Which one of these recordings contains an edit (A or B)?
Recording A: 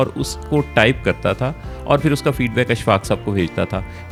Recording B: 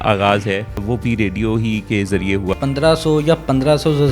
B